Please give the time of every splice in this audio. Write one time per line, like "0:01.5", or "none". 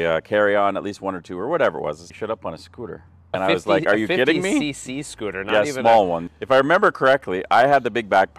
0:02.1
0:03.3